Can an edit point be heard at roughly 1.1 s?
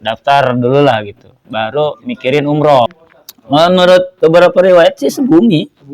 no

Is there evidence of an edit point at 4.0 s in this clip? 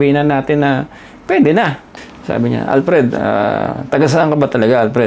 no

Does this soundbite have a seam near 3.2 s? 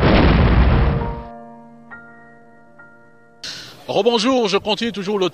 yes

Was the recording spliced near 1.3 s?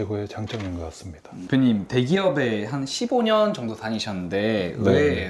yes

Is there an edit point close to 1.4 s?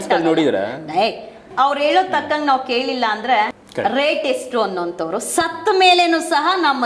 yes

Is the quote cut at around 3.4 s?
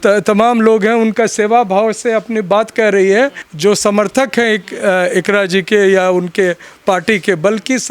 yes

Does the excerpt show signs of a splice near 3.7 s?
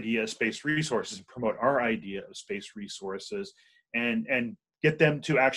no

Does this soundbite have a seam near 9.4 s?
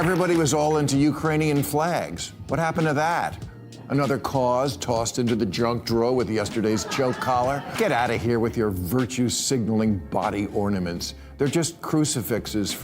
no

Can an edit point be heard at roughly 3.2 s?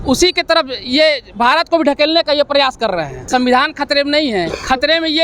yes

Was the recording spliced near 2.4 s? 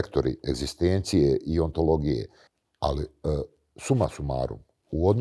yes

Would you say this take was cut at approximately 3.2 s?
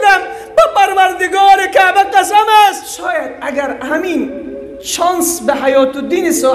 yes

